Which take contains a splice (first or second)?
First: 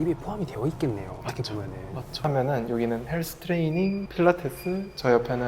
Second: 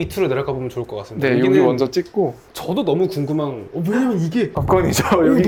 first